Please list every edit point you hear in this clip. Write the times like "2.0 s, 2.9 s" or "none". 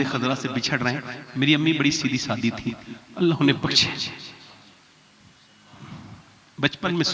none